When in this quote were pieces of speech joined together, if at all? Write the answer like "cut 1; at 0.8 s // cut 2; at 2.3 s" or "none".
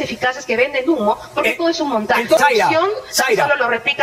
cut 1; at 2.4 s